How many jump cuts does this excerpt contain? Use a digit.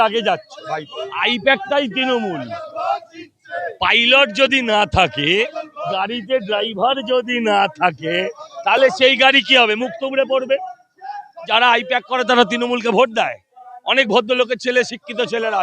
2